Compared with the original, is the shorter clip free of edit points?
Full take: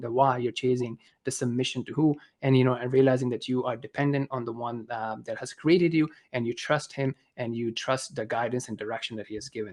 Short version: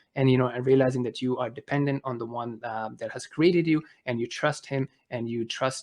yes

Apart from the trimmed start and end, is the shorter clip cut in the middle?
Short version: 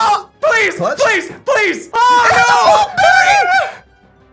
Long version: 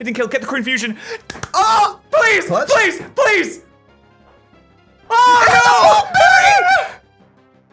yes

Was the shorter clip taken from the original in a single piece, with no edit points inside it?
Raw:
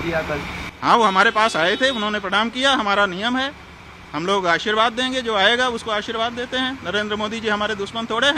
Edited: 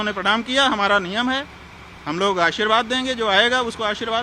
yes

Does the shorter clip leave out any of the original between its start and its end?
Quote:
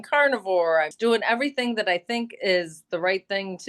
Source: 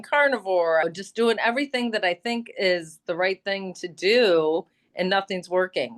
yes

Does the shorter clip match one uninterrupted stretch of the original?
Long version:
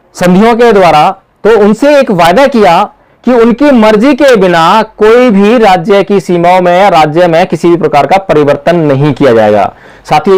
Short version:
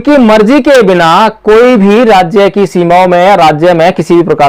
yes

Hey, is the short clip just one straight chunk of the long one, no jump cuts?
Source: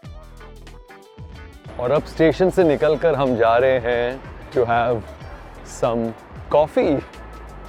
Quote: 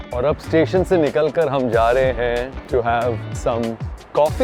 no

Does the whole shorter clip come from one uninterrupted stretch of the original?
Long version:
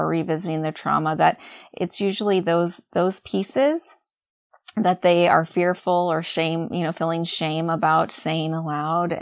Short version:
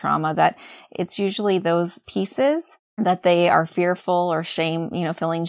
no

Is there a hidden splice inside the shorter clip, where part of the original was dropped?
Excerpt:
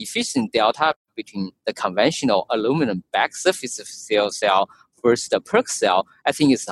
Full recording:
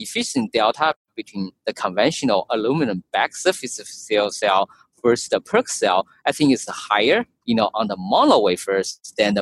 no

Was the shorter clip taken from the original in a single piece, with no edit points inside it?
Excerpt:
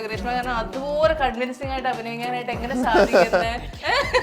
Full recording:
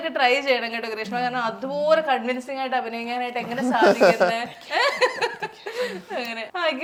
yes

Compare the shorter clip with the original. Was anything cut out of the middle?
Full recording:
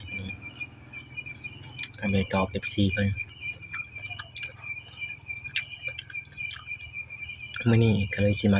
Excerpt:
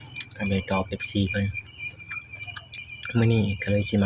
yes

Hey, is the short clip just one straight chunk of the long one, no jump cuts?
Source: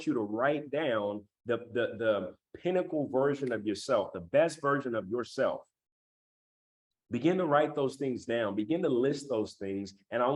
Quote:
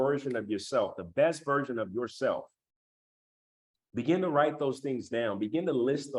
yes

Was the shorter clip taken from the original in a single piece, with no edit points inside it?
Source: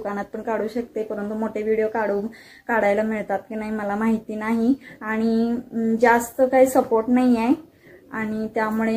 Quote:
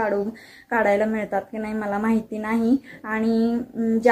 yes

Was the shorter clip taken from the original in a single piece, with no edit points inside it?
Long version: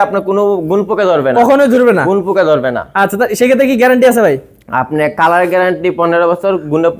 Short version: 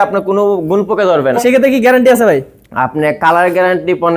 no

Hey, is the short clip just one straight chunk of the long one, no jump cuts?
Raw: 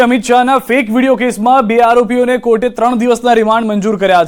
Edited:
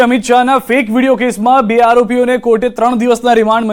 yes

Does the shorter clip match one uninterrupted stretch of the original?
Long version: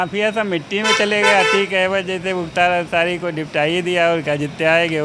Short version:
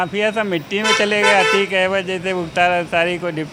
yes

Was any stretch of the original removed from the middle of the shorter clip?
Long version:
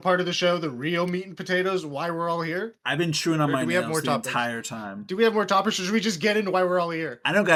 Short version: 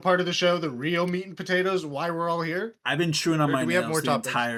no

